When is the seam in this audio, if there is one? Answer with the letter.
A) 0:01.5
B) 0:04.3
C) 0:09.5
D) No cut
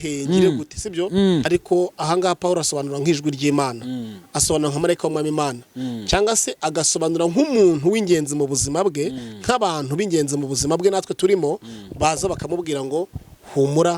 A